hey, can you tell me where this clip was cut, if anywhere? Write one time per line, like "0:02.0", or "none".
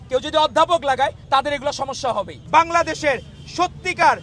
0:02.4